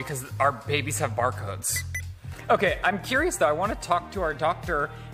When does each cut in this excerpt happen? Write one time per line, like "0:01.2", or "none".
0:02.2